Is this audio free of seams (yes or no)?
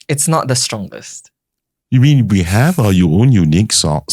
yes